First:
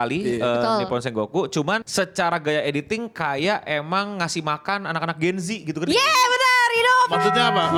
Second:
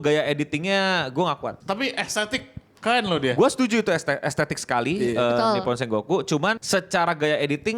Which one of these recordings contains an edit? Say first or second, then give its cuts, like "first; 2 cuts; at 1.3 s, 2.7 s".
second; 1 cut; at 1.6 s